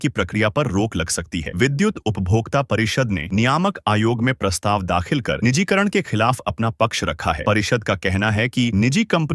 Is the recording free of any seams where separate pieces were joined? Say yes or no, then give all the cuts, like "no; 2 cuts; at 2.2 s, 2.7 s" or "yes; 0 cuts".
yes; 0 cuts